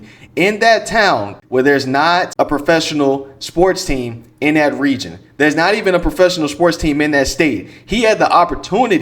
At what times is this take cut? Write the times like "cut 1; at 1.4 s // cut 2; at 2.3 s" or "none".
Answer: cut 1; at 1.3 s // cut 2; at 2.3 s